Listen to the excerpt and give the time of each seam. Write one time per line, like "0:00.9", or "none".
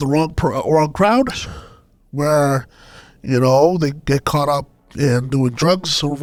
none

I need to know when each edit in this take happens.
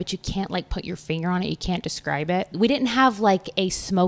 0:02.5

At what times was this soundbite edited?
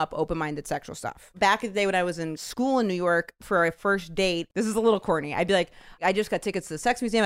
0:01.3
0:02.4
0:04.4
0:06.0

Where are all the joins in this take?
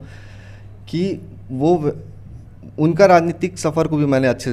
none

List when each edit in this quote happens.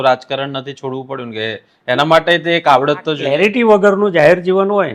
0:03.2

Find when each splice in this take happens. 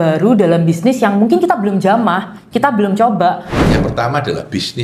0:03.5

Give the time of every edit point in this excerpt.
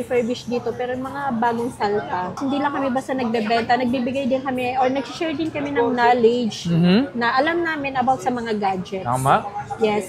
0:02.4

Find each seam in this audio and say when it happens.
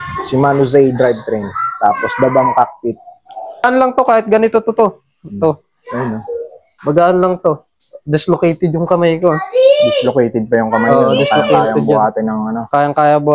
0:03.6

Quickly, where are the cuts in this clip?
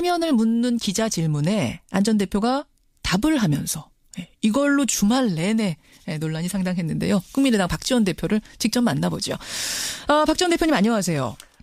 none

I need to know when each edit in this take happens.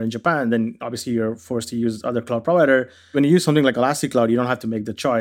0:03.1

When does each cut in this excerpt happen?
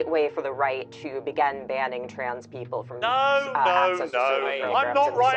none

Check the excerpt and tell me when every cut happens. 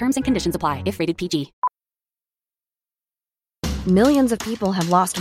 0:01.5

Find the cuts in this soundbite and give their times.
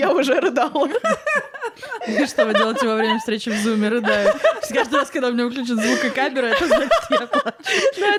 none

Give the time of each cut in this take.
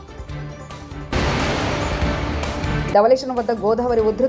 0:01.1
0:02.8

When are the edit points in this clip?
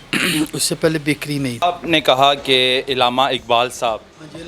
0:01.6

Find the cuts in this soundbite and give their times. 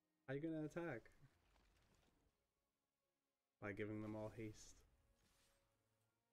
0:02.3

